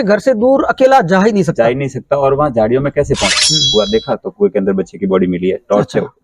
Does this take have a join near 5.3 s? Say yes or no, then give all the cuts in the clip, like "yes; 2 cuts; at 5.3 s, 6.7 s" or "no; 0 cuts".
no; 1 cut; at 3.5 s